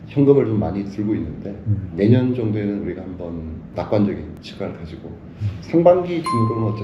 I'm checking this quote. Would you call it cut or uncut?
cut